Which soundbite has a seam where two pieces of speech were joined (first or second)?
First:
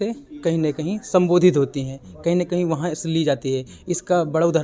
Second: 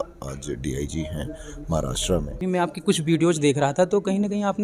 second